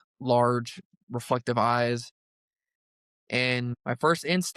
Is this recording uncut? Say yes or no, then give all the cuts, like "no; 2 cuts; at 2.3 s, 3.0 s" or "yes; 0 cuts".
no; 1 cut; at 0.9 s